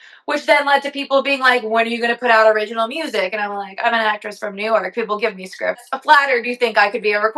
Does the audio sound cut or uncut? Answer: cut